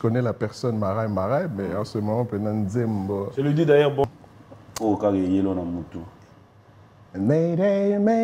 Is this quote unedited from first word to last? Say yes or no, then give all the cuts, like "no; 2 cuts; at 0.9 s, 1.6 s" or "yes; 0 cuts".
no; 1 cut; at 4.0 s